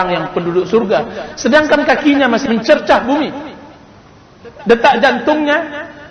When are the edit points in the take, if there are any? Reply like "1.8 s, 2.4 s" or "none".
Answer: 2.4 s